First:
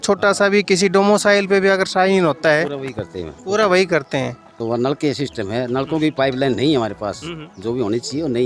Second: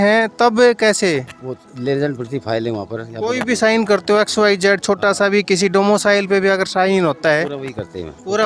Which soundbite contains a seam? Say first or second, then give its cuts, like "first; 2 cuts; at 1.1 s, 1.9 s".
first; 1 cut; at 4.6 s